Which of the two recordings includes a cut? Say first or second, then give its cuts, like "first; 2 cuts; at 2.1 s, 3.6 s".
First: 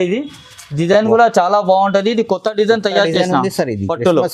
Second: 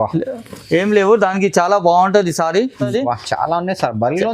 second; 1 cut; at 2.8 s